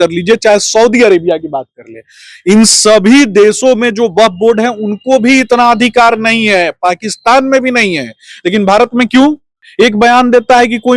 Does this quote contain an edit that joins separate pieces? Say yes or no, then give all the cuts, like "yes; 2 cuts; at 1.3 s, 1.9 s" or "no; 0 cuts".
yes; 1 cut; at 9.6 s